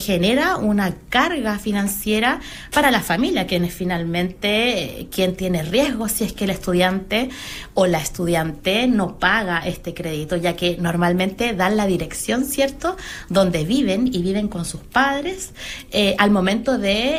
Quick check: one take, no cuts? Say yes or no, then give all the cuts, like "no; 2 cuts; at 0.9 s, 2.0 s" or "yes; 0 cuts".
yes; 0 cuts